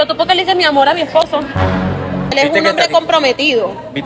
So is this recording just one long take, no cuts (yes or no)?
no